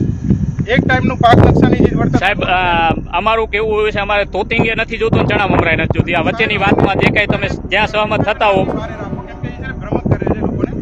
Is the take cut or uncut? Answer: uncut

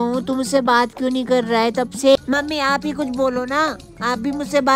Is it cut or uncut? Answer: cut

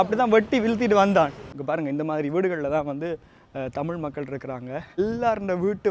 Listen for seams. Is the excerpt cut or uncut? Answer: cut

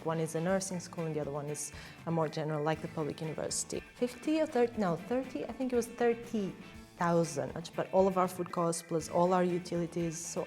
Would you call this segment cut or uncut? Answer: cut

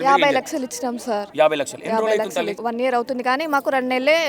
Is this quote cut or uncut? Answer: cut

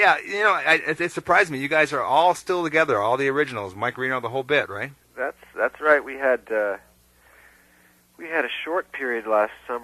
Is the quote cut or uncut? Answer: cut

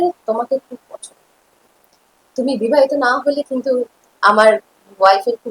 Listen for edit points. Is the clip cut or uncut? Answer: uncut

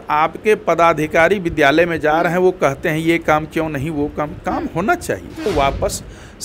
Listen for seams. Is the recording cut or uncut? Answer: cut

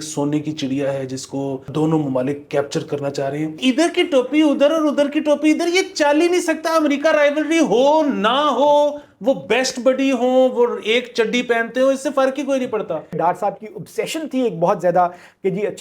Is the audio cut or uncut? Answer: cut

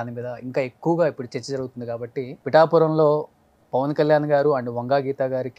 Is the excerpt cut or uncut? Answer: cut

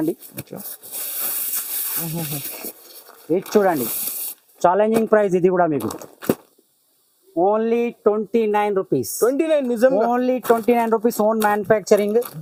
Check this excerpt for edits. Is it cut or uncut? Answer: uncut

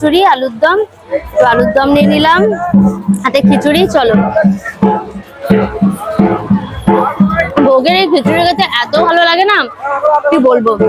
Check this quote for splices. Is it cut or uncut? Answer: uncut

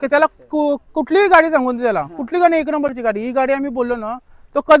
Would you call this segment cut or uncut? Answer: uncut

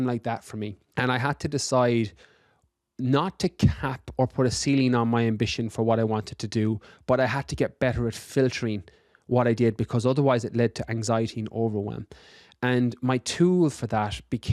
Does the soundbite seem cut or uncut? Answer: uncut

